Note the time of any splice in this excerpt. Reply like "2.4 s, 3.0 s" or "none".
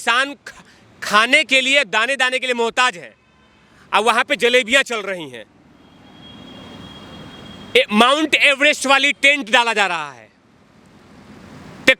none